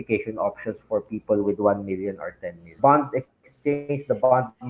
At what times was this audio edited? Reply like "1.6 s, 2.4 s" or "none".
2.8 s